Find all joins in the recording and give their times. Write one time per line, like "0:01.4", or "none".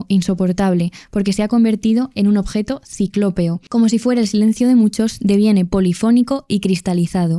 0:03.6